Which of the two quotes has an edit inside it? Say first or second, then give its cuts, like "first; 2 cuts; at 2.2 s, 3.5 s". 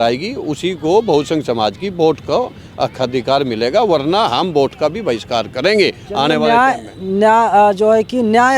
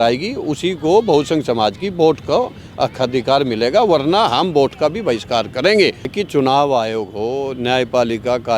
second; 1 cut; at 6.1 s